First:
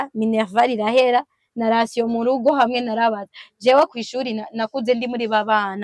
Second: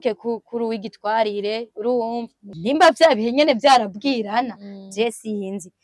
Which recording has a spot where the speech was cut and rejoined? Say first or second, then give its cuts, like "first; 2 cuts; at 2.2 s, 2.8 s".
second; 1 cut; at 2.5 s